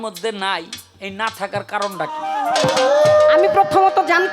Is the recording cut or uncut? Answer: cut